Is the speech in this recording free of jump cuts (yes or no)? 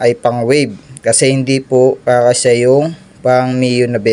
yes